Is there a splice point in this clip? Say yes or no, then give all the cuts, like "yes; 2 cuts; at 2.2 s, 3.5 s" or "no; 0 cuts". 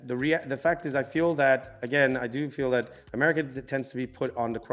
no; 0 cuts